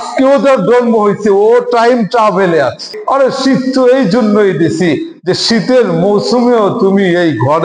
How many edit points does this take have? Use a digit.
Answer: 1